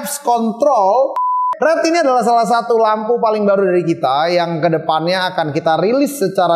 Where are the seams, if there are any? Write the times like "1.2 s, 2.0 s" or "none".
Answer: 1.4 s